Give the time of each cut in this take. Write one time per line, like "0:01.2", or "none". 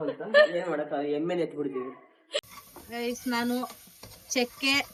none